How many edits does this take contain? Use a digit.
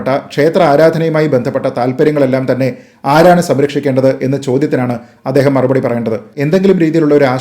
1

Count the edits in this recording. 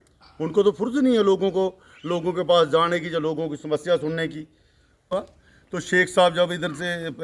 1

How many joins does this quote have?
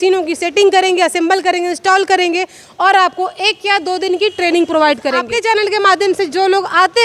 1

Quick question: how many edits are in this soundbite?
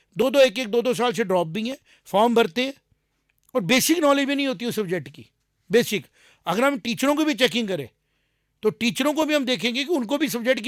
0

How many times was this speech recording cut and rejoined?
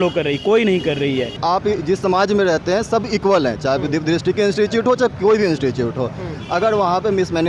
1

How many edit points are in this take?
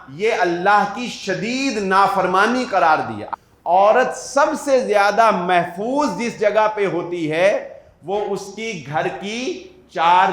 1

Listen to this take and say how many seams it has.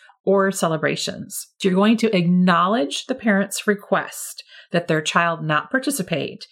1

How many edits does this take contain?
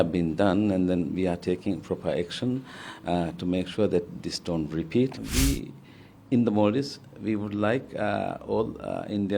1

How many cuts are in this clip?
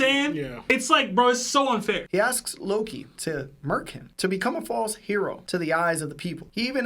1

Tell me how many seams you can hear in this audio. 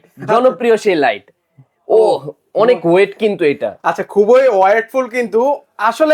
0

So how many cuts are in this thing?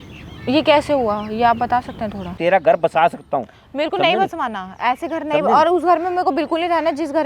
1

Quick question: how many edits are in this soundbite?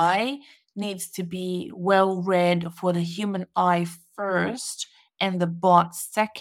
0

